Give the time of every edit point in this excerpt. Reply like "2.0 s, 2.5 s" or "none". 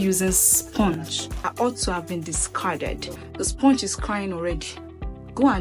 3.1 s